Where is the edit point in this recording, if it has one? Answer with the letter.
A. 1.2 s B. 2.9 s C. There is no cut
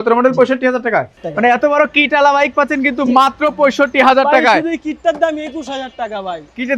A